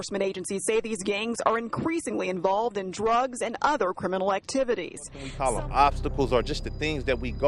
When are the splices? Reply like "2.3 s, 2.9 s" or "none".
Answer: 5.2 s